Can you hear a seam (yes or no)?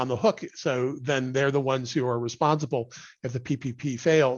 no